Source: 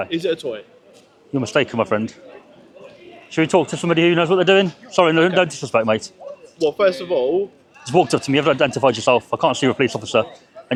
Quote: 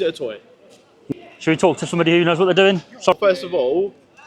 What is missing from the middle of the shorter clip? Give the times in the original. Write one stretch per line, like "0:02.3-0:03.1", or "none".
0:01.3-0:02.9
0:05.0-0:06.7